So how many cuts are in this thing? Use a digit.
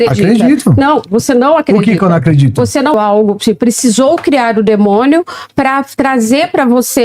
1